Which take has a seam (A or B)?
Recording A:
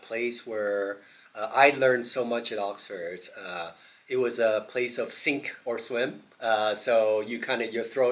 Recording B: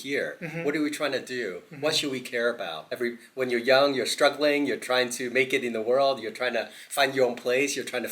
B